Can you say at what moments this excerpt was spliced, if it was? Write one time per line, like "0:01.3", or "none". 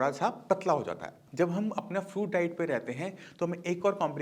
0:01.0